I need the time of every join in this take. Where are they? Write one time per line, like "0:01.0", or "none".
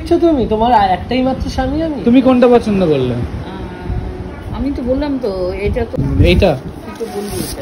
0:01.9
0:06.0